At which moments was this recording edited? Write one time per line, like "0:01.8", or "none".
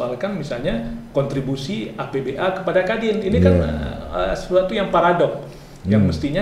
none